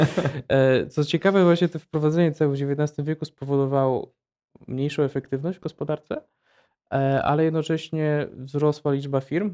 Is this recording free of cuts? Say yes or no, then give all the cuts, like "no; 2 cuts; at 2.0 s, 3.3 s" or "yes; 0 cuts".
yes; 0 cuts